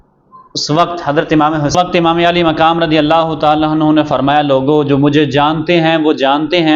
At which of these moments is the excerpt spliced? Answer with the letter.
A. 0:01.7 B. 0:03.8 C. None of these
A